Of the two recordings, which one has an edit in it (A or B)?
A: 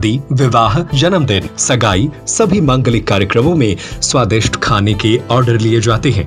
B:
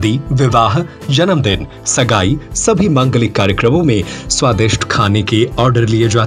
A